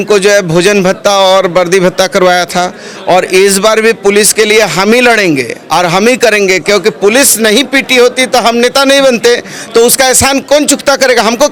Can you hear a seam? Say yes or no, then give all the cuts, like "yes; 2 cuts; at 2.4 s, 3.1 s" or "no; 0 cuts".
no; 0 cuts